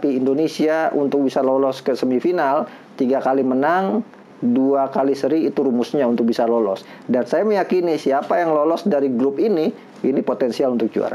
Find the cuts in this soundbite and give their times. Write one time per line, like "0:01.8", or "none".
none